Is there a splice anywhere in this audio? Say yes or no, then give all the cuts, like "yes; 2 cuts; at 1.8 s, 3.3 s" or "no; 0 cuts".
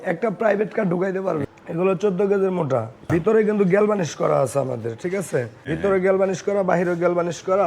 yes; 3 cuts; at 1.5 s, 3.1 s, 5.6 s